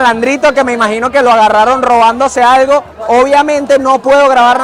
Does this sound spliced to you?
no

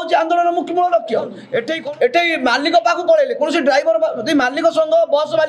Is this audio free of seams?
no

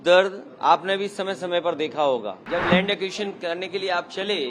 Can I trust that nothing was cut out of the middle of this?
no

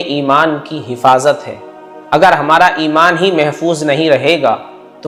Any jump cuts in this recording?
no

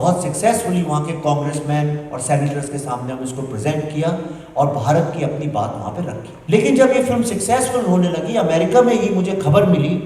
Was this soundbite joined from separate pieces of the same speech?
yes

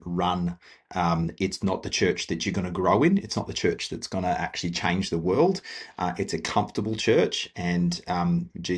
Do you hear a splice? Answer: no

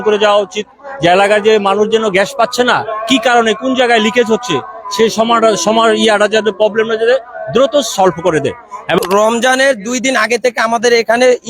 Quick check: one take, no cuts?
no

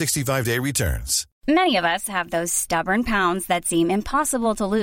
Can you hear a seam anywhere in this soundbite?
yes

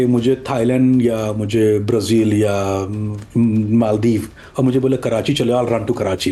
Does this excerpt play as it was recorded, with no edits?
yes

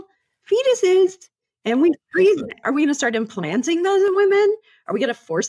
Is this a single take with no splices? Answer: no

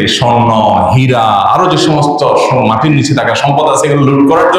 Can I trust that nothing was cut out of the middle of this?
yes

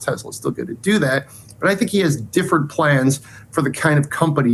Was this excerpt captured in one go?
yes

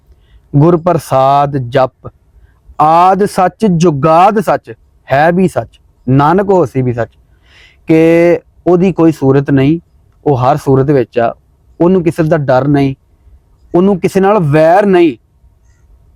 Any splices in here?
no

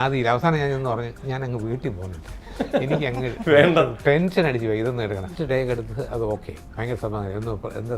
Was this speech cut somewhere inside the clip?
yes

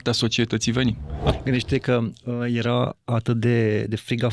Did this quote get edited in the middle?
yes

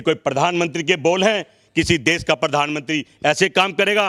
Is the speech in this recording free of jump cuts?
yes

